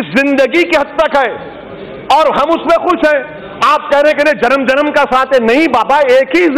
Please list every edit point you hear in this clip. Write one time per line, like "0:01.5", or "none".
none